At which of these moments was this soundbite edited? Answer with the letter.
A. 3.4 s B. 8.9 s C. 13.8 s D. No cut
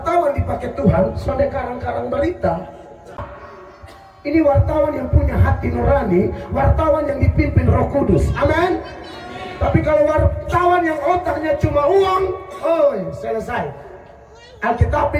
A